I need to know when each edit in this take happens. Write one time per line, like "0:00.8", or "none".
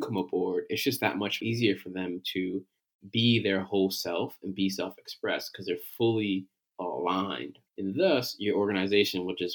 0:01.4
0:07.6